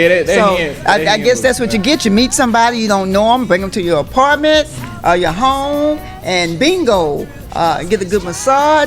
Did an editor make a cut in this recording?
no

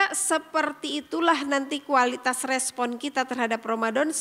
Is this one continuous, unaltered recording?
yes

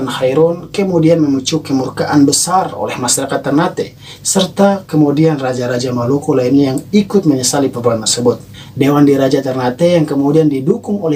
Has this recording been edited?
no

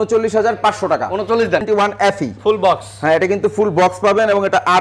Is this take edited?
yes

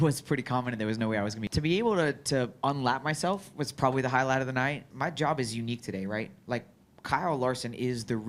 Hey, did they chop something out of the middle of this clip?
yes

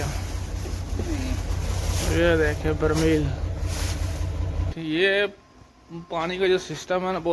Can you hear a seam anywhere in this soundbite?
yes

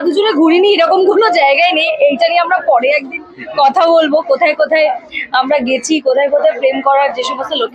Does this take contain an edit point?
no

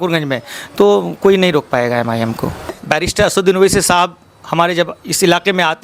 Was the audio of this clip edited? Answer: yes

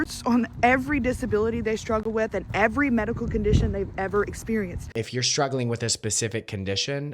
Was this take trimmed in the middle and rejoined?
yes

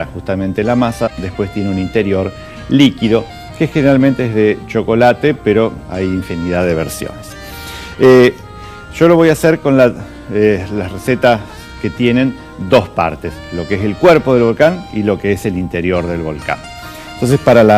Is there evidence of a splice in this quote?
yes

